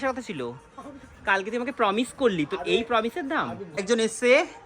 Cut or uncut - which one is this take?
cut